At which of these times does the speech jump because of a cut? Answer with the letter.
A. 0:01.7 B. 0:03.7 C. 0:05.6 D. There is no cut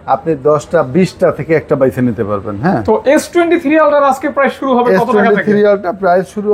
D